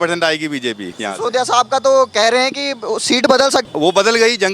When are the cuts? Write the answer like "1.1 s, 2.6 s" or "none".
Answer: 0.9 s, 3.7 s